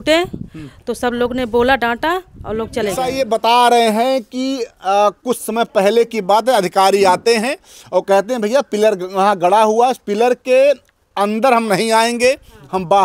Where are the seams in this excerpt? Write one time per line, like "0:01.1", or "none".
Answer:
0:03.0